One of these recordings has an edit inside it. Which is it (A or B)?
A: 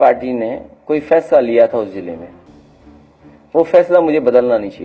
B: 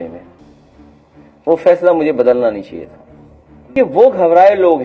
B